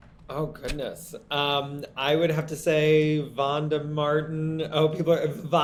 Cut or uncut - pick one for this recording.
uncut